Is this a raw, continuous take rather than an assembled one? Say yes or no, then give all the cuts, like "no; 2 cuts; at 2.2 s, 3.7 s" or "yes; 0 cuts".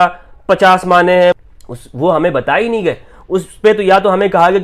no; 1 cut; at 1.4 s